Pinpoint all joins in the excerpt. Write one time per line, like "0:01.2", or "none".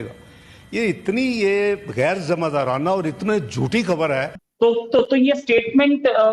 none